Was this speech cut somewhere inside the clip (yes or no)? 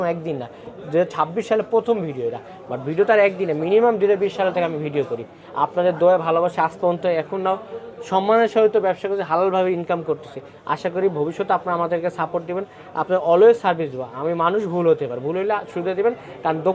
no